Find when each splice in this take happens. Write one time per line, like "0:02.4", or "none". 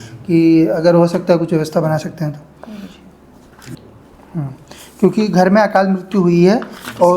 0:03.8